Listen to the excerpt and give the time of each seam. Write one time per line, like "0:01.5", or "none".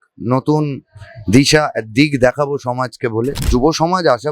0:03.4